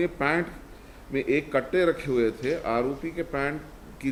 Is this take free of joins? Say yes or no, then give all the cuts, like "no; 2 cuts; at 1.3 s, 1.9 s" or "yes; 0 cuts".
yes; 0 cuts